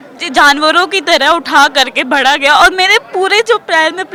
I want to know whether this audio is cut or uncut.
uncut